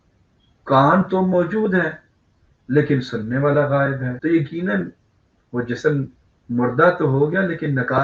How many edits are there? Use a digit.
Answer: 1